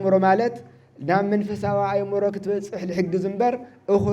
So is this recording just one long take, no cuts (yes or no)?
yes